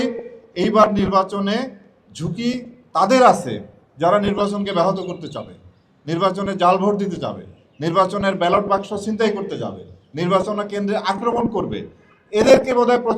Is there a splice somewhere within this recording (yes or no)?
no